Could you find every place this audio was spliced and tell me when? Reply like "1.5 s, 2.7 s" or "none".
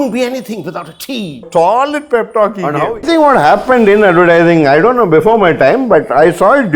1.5 s, 3.0 s

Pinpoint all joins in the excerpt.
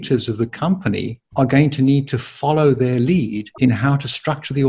1.2 s, 3.4 s

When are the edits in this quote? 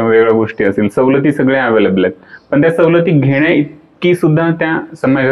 none

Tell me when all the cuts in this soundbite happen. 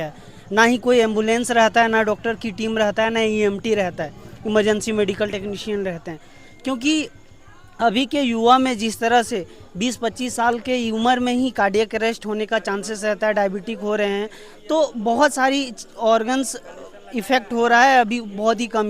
none

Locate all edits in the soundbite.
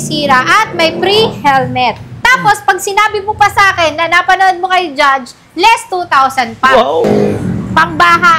2.1 s, 7.0 s

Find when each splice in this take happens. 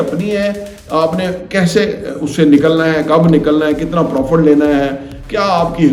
none

